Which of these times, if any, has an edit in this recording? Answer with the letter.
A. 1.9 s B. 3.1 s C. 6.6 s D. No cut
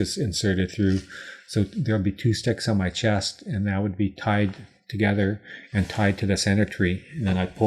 D